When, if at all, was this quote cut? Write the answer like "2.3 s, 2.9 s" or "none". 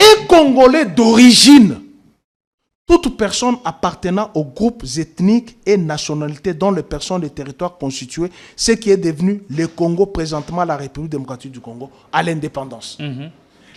none